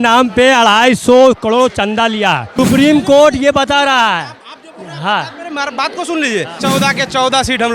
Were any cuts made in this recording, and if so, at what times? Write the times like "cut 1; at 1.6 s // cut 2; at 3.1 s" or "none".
cut 1; at 2.5 s // cut 2; at 6.6 s